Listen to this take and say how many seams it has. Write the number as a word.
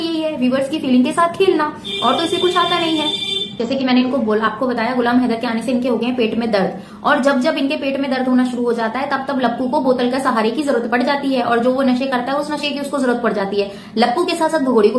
zero